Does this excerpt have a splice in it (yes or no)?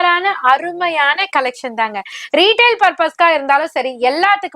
yes